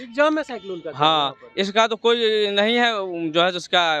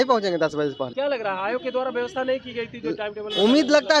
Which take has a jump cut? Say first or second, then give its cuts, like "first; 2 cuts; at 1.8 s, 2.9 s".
second; 1 cut; at 0.9 s